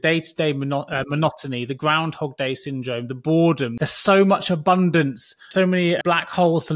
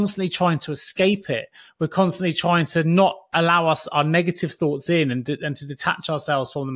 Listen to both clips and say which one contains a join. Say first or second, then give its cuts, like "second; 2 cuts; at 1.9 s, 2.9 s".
first; 2 cuts; at 3.7 s, 5.7 s